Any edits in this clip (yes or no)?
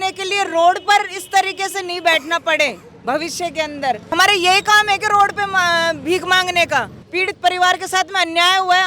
yes